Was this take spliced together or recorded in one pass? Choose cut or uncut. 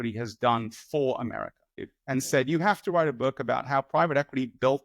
cut